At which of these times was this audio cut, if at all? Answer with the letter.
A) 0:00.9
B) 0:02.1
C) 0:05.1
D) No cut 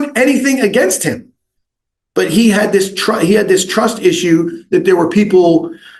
D